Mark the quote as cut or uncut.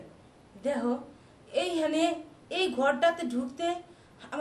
uncut